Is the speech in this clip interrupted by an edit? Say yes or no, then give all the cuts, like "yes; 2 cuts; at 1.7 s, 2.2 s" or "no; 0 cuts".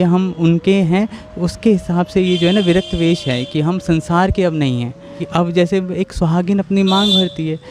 yes; 1 cut; at 5.2 s